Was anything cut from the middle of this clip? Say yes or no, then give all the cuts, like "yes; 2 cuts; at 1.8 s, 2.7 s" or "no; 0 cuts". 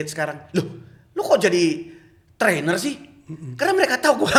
no; 0 cuts